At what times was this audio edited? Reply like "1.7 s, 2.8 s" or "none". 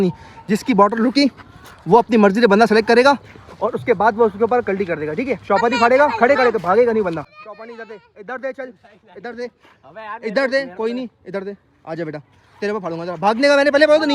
7.3 s